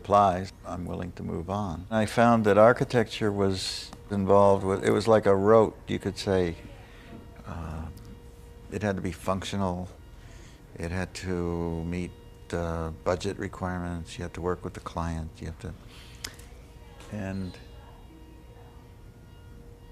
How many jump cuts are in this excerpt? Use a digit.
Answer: 1